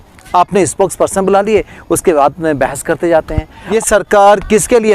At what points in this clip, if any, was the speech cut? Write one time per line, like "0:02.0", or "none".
0:03.6